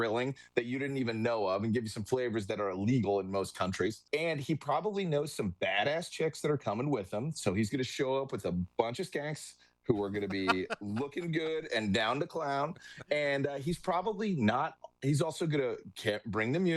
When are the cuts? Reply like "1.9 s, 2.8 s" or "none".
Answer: 4.0 s